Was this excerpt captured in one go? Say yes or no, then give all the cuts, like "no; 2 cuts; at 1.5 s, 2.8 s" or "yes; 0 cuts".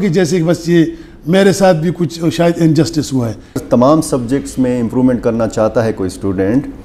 no; 1 cut; at 3.6 s